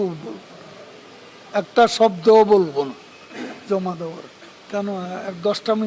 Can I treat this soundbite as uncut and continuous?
no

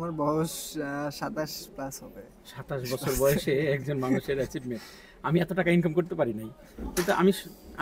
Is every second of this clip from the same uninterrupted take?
yes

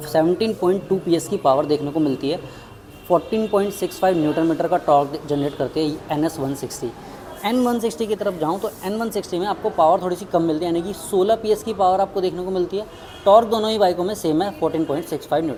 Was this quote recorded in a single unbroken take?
yes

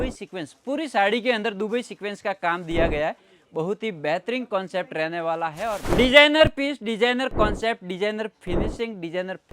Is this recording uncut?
no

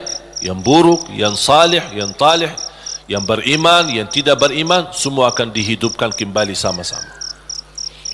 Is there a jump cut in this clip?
no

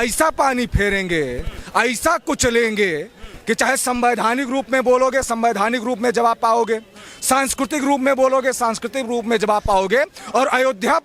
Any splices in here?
no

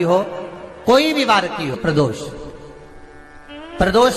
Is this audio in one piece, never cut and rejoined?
no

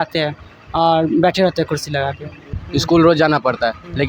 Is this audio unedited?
no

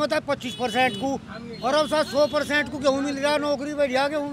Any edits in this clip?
no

